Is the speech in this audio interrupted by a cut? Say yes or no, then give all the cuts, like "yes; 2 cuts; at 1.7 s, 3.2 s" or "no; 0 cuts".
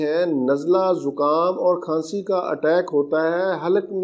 no; 0 cuts